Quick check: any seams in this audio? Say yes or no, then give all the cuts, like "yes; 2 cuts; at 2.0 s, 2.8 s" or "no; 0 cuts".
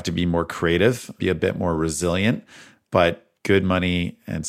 yes; 1 cut; at 1.2 s